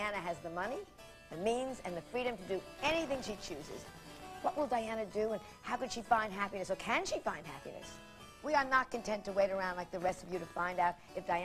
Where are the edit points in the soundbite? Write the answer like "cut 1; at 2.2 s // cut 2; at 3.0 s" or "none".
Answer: cut 1; at 1.6 s